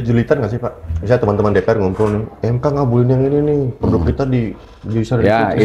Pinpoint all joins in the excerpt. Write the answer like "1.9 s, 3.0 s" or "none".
none